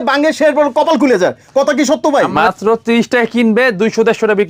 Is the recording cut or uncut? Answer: cut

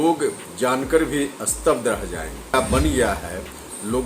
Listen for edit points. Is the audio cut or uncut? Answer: cut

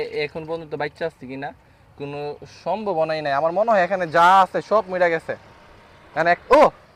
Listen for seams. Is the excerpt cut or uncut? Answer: uncut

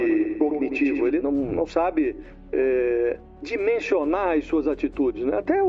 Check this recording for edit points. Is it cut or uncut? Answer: uncut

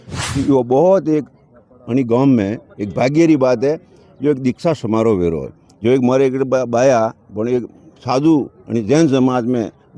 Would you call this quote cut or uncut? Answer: uncut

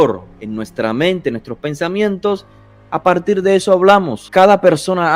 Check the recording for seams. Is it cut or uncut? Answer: cut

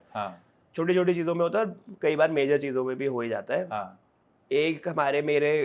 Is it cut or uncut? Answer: uncut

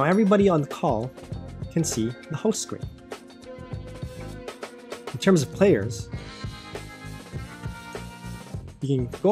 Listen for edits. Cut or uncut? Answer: cut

